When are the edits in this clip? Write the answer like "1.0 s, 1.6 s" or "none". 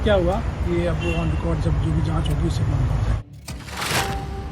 3.6 s